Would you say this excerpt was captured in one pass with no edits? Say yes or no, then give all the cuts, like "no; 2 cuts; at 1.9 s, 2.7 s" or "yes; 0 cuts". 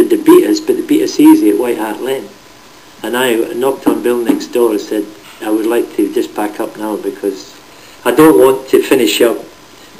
yes; 0 cuts